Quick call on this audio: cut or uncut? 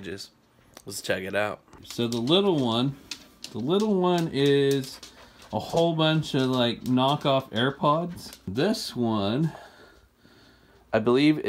cut